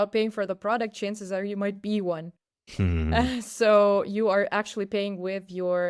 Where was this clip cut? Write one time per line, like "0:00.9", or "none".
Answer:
none